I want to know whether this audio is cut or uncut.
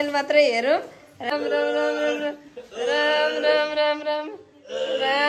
cut